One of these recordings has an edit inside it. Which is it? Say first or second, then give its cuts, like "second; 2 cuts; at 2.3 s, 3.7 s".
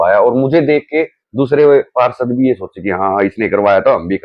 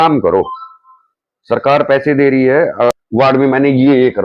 second; 1 cut; at 3.0 s